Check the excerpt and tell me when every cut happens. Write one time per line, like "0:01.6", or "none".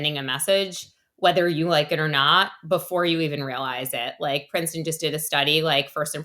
none